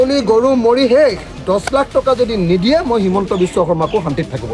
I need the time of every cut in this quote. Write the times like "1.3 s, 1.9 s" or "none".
1.4 s